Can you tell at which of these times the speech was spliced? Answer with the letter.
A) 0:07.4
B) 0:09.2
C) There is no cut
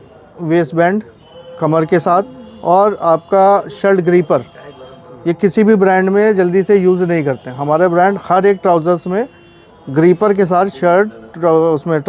C